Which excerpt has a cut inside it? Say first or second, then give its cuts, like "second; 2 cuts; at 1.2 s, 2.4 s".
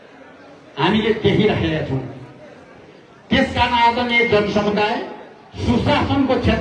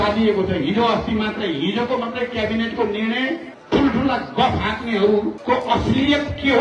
second; 2 cuts; at 3.5 s, 5.4 s